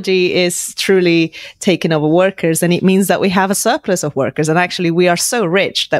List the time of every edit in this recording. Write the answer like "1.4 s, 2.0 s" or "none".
none